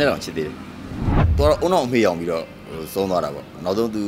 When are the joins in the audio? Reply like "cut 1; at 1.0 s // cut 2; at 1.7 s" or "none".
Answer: cut 1; at 1.3 s